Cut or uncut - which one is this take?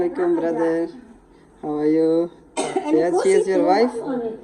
uncut